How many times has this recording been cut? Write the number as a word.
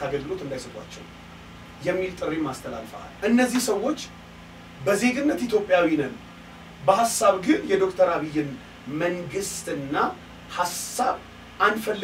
one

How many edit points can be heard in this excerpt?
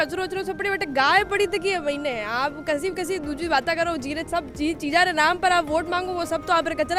zero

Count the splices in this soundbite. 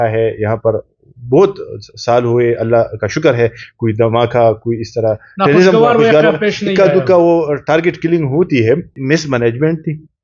one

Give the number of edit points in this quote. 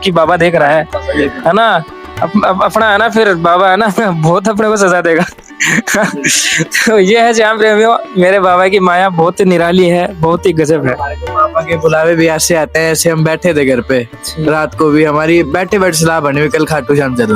zero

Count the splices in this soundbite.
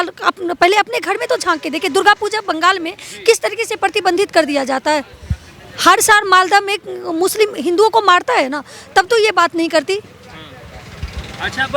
zero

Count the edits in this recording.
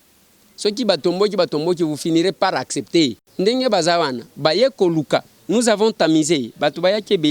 one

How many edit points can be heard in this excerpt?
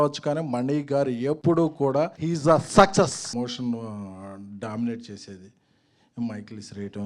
three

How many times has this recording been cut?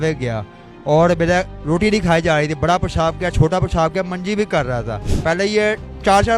one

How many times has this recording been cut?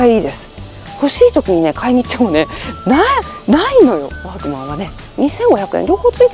one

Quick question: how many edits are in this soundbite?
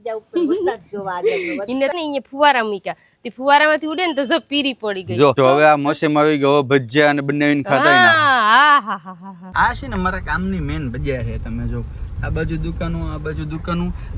three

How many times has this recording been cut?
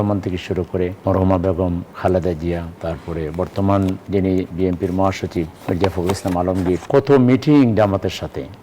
six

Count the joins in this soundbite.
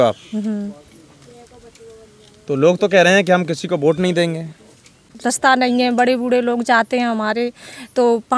one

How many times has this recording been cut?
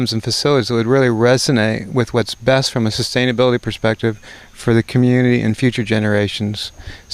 one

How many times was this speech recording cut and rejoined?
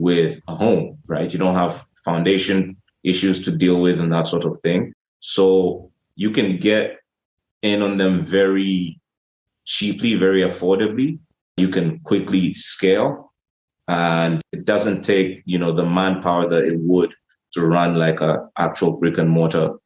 two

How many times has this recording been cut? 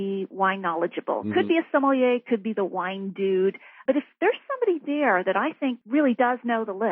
one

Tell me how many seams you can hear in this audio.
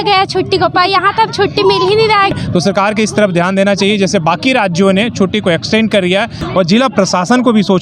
two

